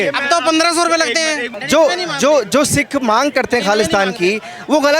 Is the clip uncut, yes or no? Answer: no